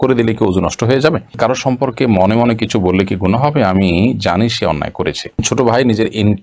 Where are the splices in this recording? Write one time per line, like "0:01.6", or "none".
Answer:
0:01.4
0:05.4